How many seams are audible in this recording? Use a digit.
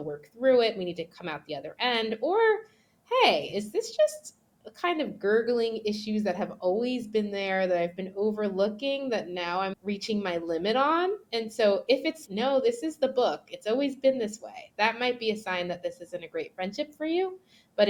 0